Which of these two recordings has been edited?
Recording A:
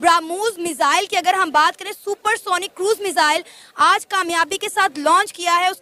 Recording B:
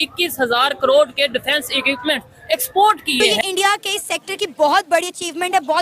B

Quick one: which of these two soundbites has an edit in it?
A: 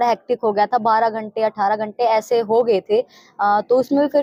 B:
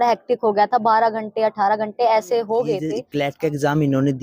B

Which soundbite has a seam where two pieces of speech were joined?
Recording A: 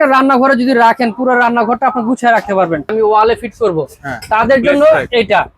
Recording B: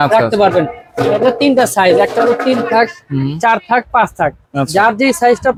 A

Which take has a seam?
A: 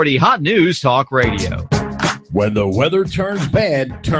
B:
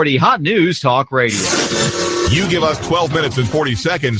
B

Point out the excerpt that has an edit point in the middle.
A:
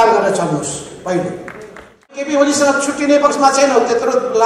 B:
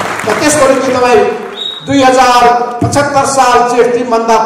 A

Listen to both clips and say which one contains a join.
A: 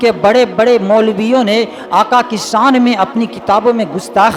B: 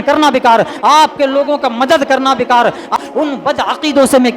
B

